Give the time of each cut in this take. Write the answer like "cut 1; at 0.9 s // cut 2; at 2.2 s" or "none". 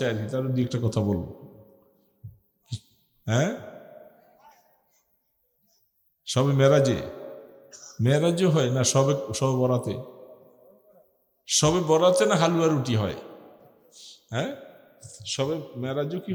none